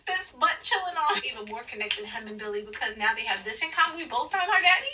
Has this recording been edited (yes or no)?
yes